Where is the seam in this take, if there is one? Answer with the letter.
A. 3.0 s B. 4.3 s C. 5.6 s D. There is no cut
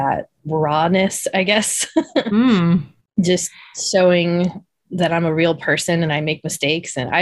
A